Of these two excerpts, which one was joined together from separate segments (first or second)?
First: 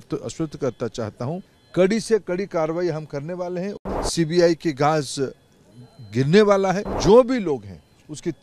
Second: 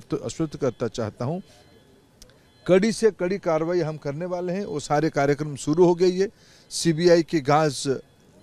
first